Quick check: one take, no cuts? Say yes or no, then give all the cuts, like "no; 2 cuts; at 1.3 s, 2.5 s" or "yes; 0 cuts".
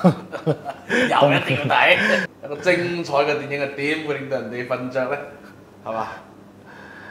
no; 1 cut; at 2.2 s